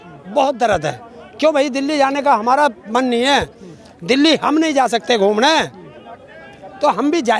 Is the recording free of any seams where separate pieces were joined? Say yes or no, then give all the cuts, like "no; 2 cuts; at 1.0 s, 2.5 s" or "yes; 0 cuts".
yes; 0 cuts